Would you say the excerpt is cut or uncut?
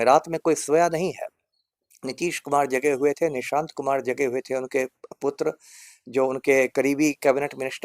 uncut